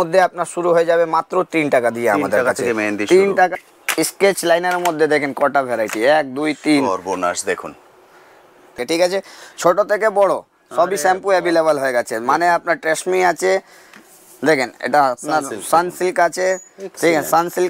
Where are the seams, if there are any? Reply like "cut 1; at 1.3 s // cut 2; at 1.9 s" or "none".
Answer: cut 1; at 3.5 s // cut 2; at 8.8 s